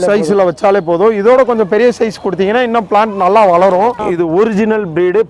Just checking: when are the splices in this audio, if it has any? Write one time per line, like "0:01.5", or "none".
0:04.1